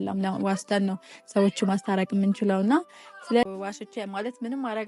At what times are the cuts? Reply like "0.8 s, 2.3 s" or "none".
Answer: none